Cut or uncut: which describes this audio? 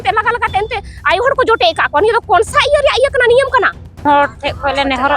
cut